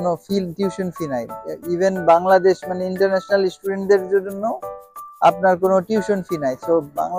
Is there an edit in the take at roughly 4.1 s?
no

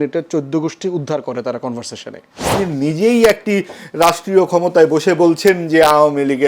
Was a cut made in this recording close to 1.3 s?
no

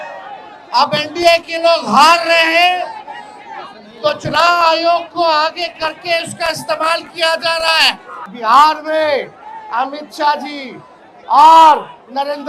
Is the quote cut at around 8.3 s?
yes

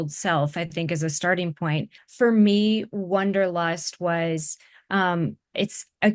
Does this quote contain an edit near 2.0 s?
yes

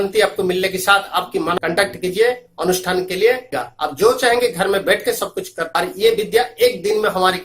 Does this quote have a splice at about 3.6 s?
yes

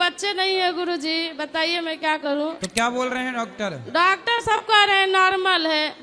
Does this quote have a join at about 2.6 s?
yes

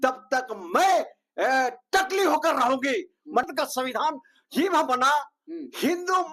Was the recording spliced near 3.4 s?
yes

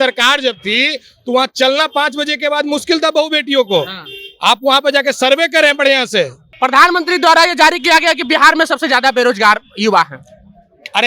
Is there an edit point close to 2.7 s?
no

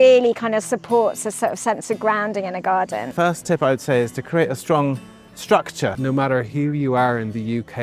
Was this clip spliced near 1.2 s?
no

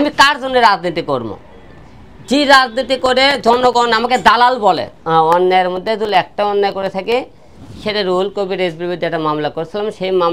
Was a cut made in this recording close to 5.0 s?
yes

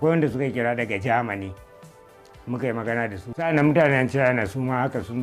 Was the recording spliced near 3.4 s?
yes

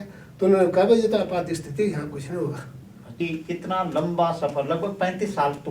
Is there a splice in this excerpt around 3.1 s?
yes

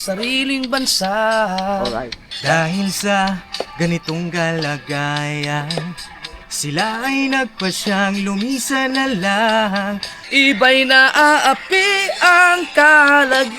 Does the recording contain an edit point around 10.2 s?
yes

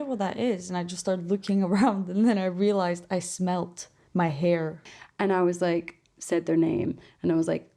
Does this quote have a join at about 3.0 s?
no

